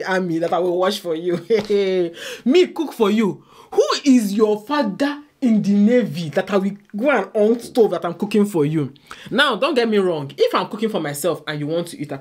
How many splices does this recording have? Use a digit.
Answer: 0